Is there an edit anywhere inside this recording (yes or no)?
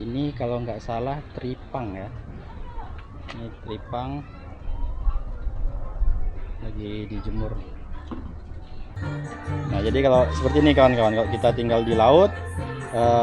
yes